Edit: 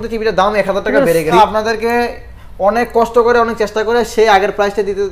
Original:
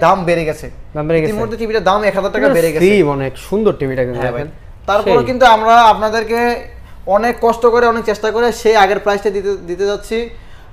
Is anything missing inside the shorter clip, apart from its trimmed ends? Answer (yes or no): yes